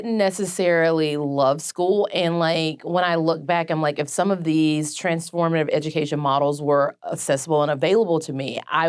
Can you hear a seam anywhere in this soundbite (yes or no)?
no